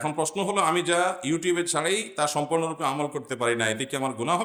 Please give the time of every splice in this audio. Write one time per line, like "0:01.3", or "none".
none